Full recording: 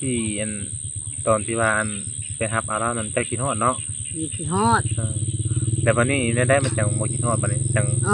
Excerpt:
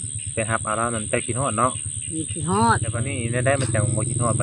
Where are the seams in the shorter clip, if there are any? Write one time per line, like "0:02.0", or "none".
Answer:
0:03.2